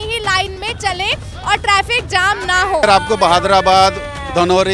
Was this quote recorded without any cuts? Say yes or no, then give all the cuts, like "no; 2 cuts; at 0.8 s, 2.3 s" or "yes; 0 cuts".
no; 1 cut; at 2.8 s